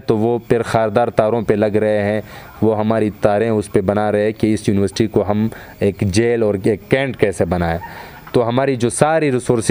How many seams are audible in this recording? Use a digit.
0